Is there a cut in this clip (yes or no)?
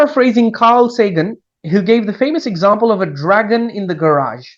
no